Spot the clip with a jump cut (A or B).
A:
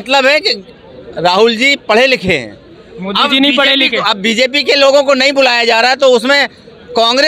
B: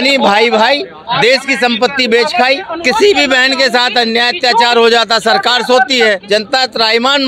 B